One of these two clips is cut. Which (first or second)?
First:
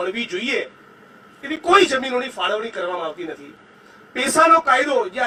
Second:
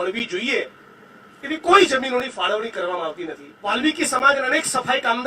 second